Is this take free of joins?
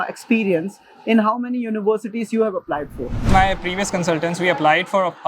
no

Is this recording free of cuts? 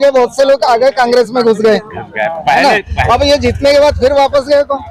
yes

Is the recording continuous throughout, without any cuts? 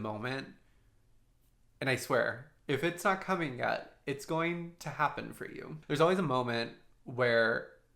no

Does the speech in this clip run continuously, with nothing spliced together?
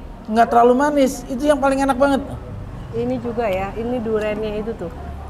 yes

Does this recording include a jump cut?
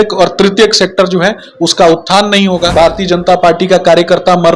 yes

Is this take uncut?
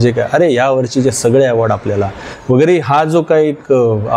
yes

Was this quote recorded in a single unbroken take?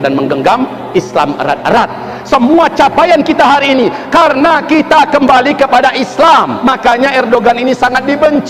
no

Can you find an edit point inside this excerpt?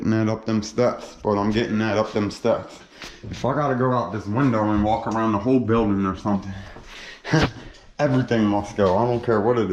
no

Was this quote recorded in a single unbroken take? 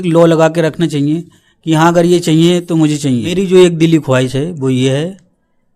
no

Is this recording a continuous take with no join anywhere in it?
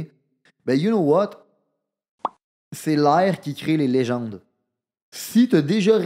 yes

